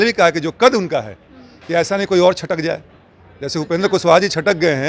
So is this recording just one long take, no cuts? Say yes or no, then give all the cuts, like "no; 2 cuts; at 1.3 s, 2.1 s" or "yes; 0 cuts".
yes; 0 cuts